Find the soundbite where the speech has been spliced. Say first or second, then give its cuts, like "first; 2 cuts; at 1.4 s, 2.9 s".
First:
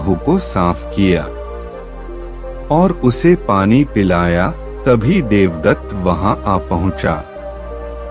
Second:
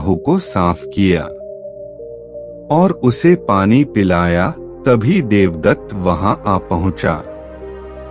second; 2 cuts; at 1.3 s, 2.6 s